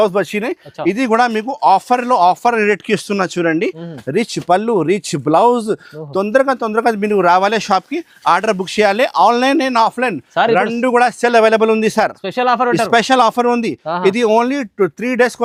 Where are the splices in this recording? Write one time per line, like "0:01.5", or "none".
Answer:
none